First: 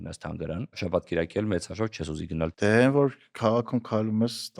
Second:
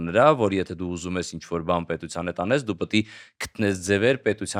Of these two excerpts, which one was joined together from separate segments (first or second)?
first